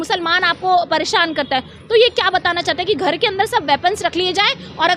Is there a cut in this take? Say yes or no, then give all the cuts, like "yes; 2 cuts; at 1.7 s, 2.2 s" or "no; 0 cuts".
no; 0 cuts